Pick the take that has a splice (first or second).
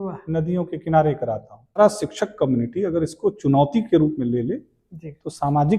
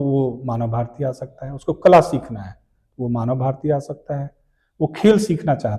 first